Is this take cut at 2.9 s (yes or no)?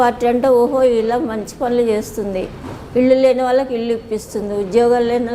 no